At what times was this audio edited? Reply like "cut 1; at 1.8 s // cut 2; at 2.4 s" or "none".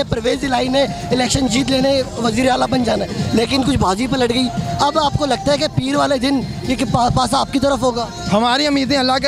none